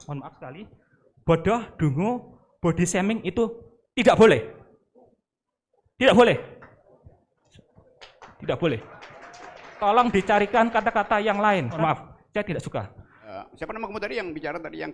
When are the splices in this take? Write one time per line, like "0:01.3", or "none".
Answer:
0:11.8
0:13.3